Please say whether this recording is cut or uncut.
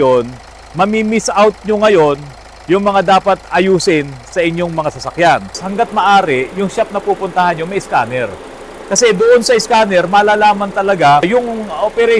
cut